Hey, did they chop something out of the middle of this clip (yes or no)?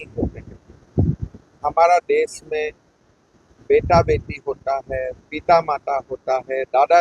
no